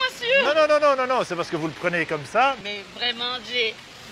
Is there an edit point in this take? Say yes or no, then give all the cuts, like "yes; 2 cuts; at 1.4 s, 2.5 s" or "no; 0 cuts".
yes; 1 cut; at 2.6 s